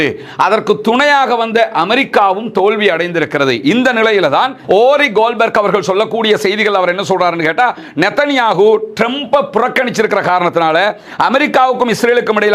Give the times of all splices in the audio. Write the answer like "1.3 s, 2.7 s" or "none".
4.6 s